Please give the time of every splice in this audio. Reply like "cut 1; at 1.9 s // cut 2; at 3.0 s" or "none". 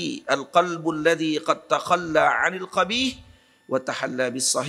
none